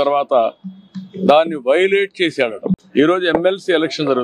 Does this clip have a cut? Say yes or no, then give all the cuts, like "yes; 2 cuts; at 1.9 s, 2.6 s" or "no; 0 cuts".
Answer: no; 0 cuts